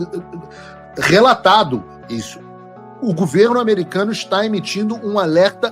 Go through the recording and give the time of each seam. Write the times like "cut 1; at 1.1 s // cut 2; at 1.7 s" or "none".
cut 1; at 2.4 s